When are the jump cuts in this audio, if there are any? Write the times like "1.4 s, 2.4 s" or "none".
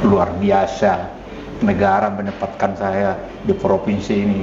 none